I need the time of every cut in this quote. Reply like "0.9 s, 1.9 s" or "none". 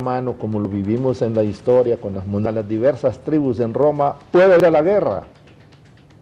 none